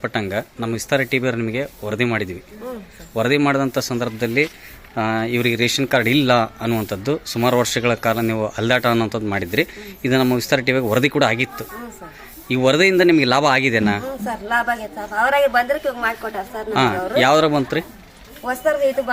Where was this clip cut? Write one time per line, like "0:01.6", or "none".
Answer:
none